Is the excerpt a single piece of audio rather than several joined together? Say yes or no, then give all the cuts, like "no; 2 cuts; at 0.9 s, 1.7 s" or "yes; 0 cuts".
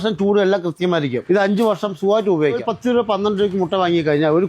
no; 2 cuts; at 1.2 s, 2.7 s